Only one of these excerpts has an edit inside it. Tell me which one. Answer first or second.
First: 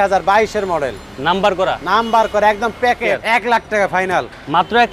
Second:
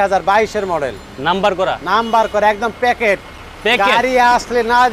first